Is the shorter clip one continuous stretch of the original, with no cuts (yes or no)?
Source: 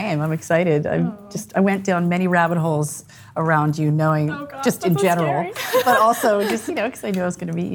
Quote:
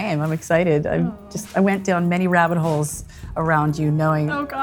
yes